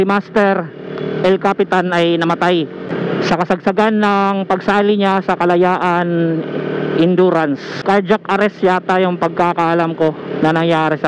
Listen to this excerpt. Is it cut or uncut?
cut